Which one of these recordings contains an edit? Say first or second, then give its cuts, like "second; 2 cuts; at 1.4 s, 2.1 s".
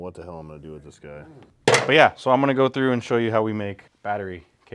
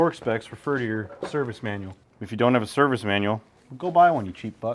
first; 1 cut; at 1.4 s